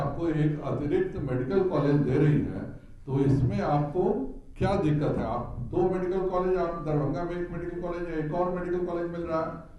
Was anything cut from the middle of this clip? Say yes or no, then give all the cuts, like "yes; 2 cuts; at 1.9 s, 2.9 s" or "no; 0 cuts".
no; 0 cuts